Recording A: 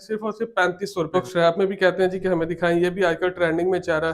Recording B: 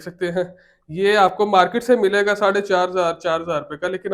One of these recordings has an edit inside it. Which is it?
A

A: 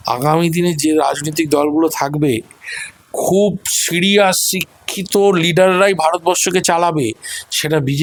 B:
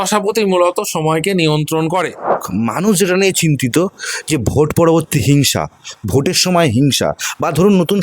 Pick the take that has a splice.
B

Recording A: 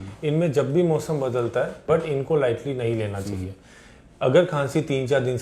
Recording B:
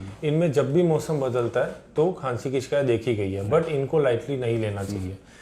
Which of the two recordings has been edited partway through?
A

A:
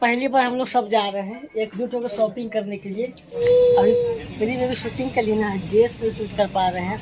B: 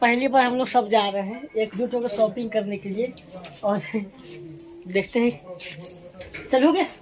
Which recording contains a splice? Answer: A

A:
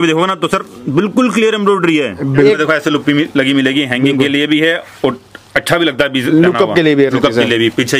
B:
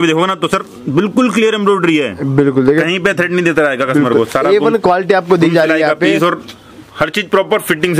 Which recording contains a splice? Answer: A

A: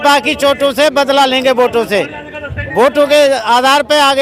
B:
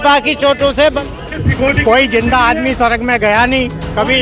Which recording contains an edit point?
B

